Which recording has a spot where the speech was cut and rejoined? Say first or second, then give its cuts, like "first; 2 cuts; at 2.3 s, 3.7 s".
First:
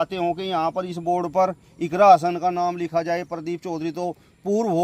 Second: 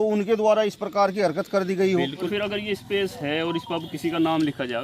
second; 1 cut; at 2.3 s